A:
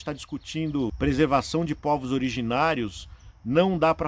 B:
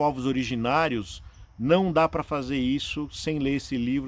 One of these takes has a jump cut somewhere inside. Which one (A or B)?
A